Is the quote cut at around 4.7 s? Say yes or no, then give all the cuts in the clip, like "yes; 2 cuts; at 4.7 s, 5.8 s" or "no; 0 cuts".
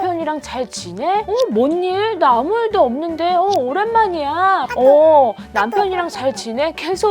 yes; 1 cut; at 4.7 s